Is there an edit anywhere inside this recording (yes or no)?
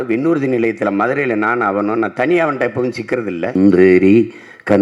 yes